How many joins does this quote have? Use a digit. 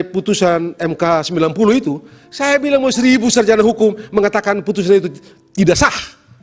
0